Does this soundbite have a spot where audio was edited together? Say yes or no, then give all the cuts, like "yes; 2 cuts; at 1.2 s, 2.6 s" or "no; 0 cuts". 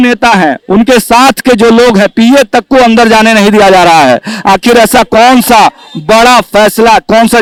no; 0 cuts